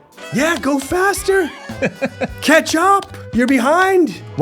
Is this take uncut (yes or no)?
no